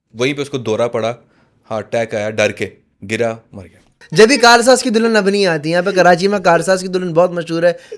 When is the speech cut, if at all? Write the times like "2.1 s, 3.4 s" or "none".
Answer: 4.0 s